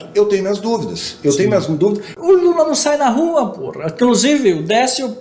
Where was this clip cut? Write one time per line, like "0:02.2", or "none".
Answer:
0:02.1